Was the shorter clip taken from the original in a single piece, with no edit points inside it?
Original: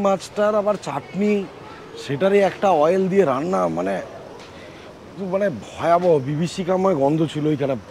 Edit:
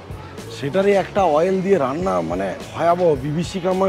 no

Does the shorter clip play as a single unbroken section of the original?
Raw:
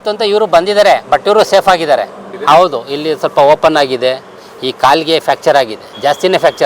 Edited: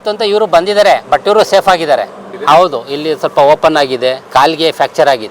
no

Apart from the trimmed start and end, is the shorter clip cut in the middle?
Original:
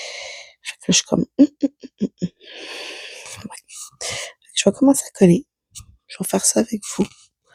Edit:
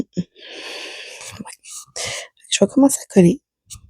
no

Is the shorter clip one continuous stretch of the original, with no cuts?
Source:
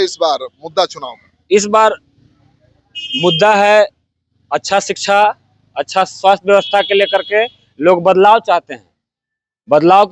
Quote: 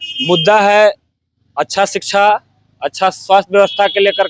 yes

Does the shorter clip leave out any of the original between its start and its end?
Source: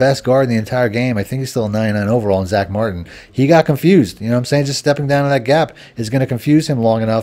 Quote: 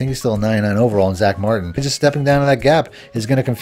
yes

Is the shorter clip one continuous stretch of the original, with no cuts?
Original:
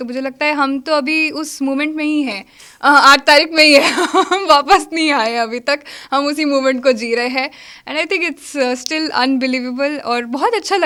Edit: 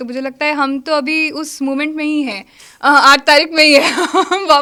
yes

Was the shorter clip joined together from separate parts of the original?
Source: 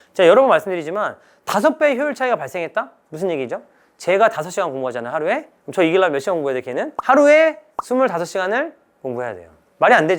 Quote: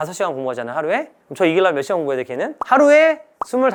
no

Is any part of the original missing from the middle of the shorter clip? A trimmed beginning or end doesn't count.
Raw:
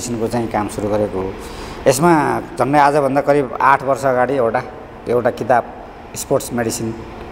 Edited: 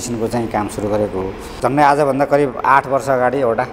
yes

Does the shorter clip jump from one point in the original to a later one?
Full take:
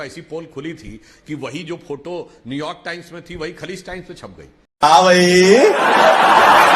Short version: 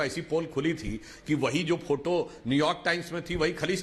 no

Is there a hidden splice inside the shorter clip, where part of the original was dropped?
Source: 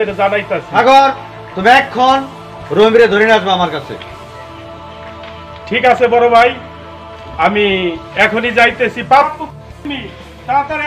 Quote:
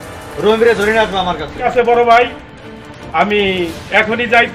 yes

